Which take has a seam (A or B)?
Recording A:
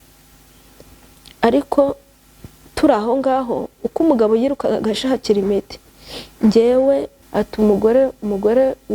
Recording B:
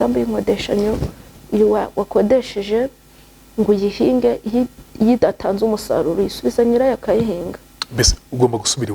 A